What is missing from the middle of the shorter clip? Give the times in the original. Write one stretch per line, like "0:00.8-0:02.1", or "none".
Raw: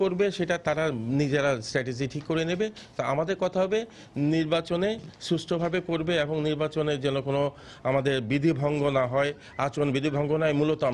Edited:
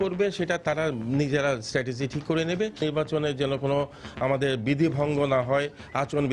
0:02.8-0:06.4

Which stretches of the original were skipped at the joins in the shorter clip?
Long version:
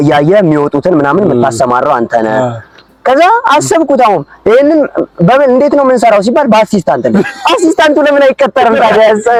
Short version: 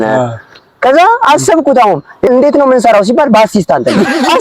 0:04.5-0:05.5

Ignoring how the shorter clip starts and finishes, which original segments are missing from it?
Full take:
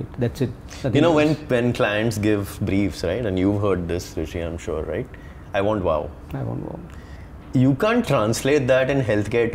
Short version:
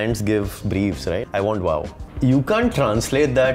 0:03.2-0:05.4
0:06.2-0:07.3

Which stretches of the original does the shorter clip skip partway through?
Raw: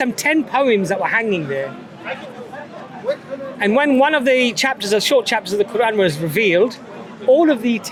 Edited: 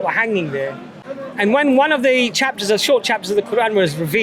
0:02.0-0:03.3

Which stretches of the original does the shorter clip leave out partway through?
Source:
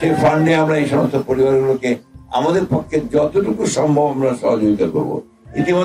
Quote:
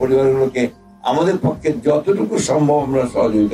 none

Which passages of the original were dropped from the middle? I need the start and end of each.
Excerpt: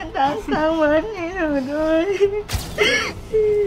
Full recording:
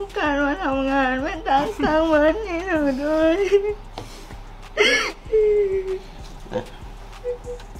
0:03.9-0:04.6

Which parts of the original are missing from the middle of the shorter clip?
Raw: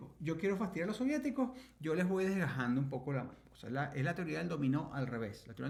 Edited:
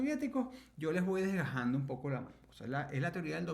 none

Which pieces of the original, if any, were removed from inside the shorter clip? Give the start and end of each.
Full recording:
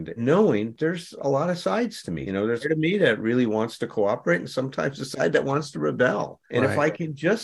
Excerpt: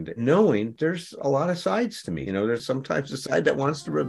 0:02.6-0:04.5

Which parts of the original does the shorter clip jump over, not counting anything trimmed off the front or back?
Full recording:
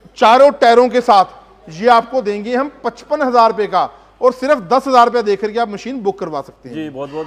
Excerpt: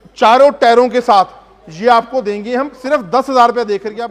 0:02.8-0:04.4

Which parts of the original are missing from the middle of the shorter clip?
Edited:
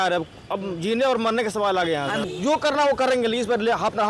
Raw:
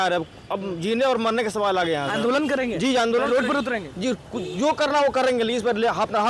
0:02.2-0:04.4

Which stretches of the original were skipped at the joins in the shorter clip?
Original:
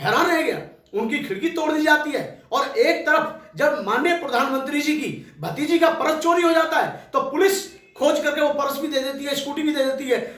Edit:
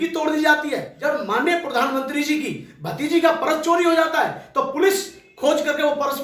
0:02.3-0:03.5

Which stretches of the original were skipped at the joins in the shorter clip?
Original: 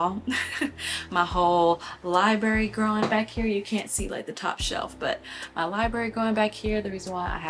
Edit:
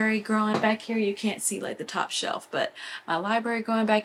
none

